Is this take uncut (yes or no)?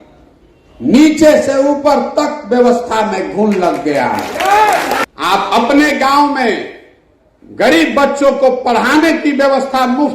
no